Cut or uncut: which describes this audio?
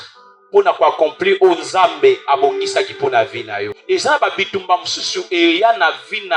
cut